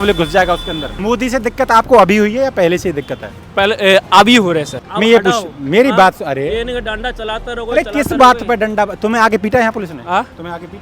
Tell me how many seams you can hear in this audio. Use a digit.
2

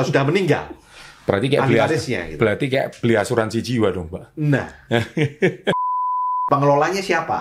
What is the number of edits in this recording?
1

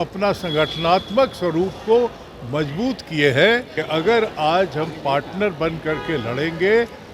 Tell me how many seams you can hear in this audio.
1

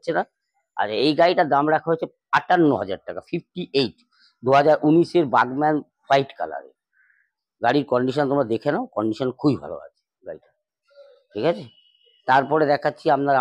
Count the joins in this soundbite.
0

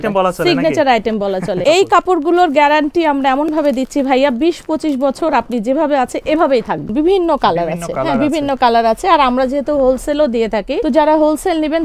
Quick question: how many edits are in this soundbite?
3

